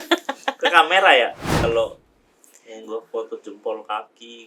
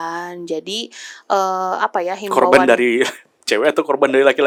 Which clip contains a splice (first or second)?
first